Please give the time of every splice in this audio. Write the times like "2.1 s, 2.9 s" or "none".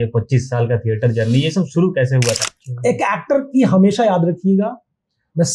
2.4 s